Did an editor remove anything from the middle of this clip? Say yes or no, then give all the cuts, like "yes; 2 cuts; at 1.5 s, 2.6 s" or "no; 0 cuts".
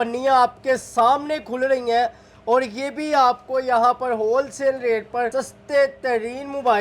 yes; 1 cut; at 5.3 s